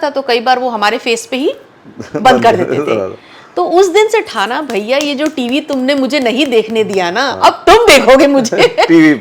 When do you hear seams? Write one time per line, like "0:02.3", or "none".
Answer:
none